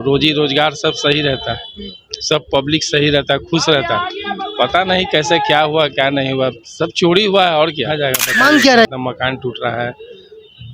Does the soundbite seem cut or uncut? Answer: cut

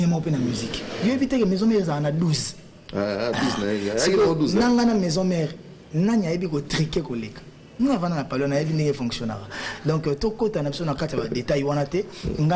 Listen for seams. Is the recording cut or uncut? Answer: uncut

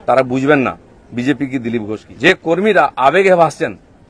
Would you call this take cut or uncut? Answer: cut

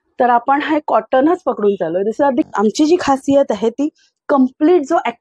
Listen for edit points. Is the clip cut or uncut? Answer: cut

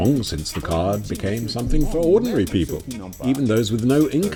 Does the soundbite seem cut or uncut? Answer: uncut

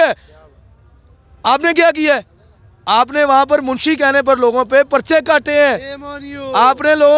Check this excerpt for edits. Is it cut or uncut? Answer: uncut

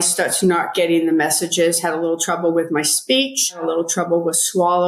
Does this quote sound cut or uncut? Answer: cut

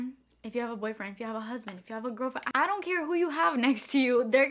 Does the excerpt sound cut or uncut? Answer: uncut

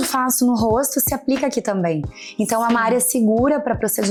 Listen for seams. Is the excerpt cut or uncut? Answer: uncut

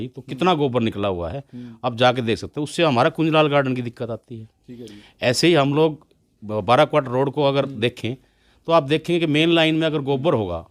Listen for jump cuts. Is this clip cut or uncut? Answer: uncut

